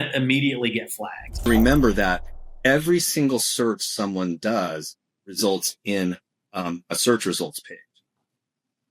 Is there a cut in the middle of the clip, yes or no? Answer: yes